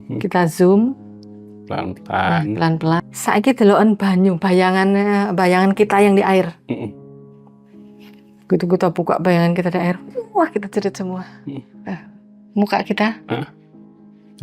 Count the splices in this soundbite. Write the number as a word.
one